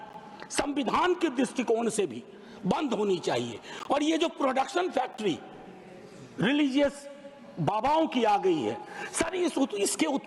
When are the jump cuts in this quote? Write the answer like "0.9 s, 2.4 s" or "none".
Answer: none